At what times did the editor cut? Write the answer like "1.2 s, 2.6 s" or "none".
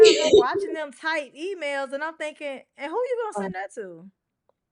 none

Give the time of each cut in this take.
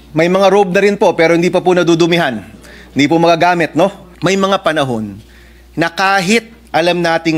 4.1 s

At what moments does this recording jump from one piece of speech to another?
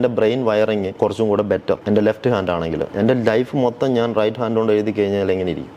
0.9 s, 1.8 s, 2.9 s

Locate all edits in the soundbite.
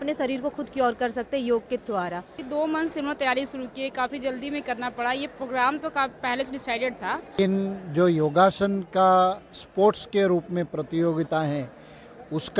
2.3 s, 7.3 s

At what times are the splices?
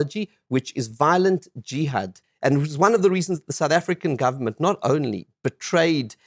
2.2 s

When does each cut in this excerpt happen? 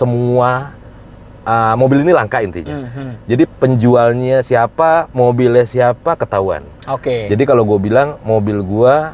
none

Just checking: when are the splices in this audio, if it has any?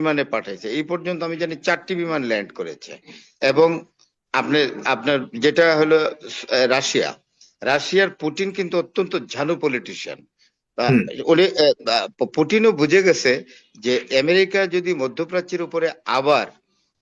none

